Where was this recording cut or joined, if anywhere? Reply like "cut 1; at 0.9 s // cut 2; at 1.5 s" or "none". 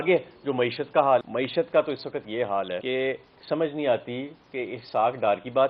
cut 1; at 1.3 s // cut 2; at 2.8 s